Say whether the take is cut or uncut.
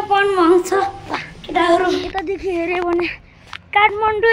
cut